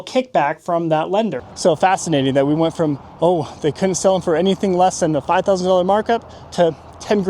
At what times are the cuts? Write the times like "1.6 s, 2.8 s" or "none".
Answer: 1.4 s